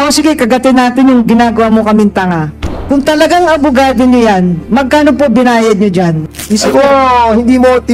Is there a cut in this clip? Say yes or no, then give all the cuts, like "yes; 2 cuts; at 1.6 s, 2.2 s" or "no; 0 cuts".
yes; 1 cut; at 6.2 s